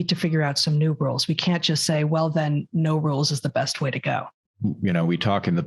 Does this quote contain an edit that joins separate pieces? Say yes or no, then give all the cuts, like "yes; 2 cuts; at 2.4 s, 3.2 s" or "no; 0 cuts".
yes; 1 cut; at 4.3 s